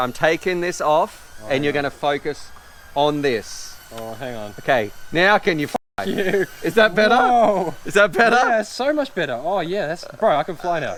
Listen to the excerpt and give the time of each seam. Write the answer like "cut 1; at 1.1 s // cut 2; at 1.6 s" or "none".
none